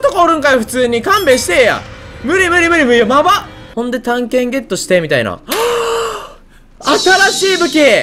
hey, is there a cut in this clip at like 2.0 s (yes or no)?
no